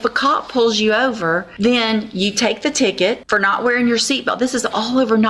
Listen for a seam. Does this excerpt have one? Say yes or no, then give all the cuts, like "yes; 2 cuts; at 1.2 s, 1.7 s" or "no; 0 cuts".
yes; 2 cuts; at 1.5 s, 3.2 s